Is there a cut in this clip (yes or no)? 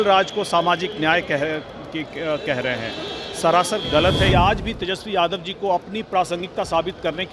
yes